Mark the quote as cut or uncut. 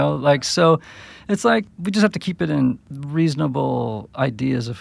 cut